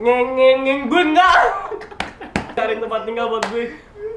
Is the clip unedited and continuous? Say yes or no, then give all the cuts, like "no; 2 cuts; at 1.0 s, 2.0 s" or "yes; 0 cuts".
no; 1 cut; at 2.6 s